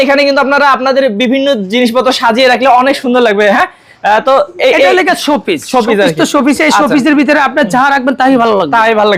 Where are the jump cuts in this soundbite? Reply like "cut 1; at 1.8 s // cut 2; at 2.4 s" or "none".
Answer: none